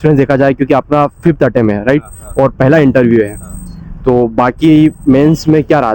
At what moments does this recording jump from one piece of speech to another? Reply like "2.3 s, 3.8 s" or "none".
none